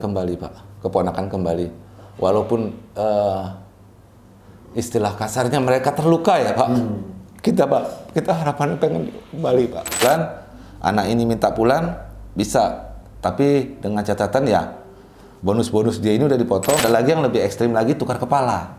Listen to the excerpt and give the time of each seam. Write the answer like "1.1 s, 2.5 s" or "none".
10.0 s, 16.8 s